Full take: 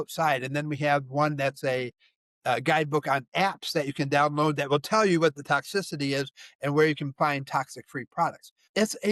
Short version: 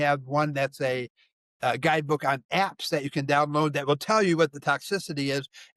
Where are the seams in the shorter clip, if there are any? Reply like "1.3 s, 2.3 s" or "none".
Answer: none